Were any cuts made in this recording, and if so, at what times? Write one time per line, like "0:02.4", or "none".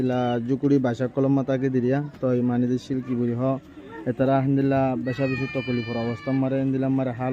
none